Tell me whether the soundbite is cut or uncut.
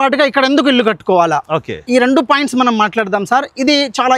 uncut